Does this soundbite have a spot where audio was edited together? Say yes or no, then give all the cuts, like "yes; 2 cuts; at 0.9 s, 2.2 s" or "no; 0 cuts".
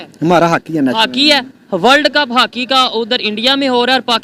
no; 0 cuts